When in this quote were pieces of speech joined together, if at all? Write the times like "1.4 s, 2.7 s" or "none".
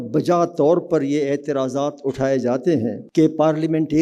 3.0 s

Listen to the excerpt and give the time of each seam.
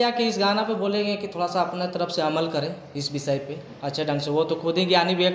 none

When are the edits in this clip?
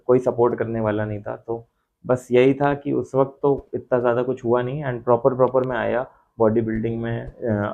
none

